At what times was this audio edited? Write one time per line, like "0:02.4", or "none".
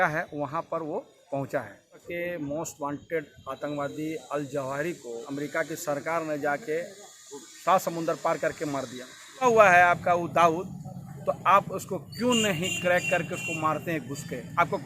0:02.1
0:05.3
0:09.4